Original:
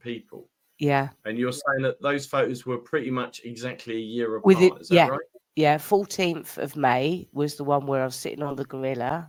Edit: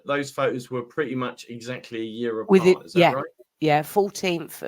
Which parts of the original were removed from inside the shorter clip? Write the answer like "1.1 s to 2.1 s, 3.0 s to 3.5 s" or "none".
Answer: none